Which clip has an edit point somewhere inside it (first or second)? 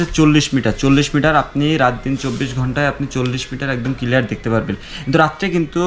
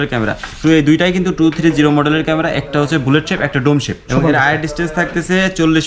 second